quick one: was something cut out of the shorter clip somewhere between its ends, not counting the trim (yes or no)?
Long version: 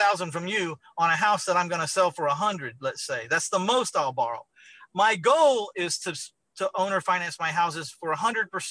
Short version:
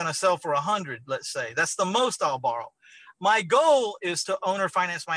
yes